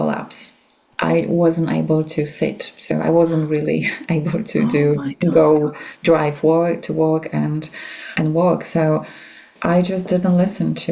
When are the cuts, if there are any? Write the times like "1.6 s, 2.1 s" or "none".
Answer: none